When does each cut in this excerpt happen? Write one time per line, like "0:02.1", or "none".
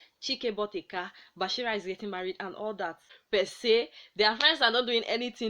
0:03.1